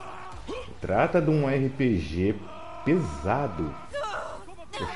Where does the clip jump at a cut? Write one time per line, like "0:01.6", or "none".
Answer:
0:03.8